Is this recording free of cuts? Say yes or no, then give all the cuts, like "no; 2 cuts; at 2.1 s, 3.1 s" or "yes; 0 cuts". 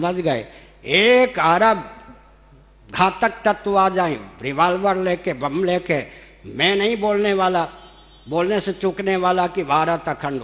yes; 0 cuts